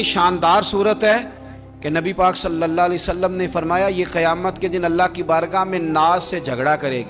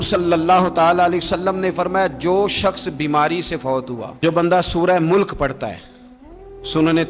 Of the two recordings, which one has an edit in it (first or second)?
second